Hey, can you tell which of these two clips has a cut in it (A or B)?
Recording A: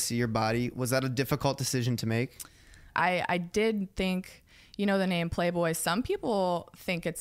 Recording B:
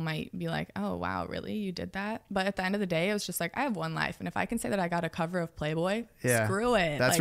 A